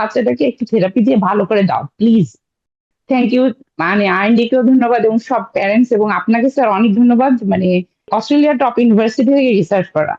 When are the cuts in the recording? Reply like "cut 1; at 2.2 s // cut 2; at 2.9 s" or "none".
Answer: cut 1; at 2.6 s // cut 2; at 8.1 s

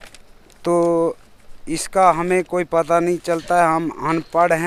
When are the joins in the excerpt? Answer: none

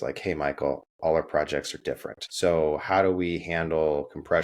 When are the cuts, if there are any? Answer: cut 1; at 2.2 s

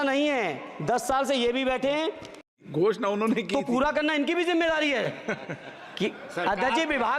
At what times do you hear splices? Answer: cut 1; at 2.6 s

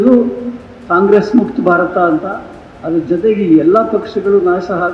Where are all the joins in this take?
none

